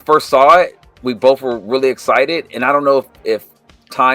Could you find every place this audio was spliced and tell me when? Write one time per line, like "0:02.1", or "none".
none